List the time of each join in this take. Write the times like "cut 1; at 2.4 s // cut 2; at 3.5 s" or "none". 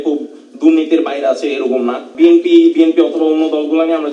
cut 1; at 2.1 s